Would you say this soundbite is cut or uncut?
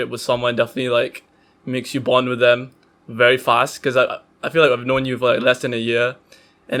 uncut